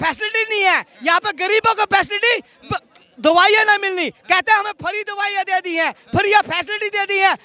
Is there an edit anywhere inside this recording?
no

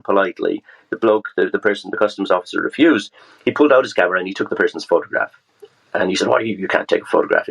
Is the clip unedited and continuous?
yes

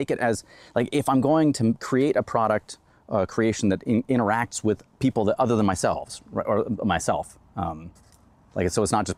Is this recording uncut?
yes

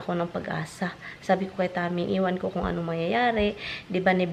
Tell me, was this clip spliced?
no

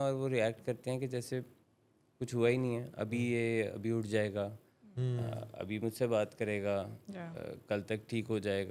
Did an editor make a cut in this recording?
no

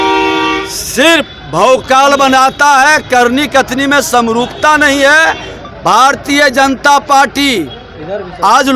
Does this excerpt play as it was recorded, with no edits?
yes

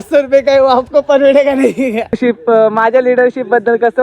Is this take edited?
yes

